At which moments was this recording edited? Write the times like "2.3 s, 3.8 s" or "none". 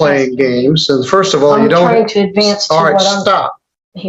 none